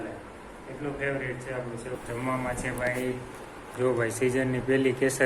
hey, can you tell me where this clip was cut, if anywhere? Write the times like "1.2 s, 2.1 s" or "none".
2.0 s